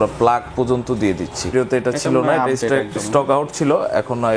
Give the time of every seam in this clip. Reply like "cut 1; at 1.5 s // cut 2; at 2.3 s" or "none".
cut 1; at 1.5 s